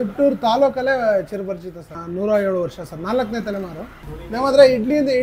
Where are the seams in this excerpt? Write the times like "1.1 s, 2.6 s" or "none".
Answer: 1.9 s, 3.9 s